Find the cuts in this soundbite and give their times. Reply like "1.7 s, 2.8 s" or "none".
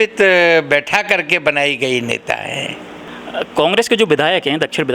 3.1 s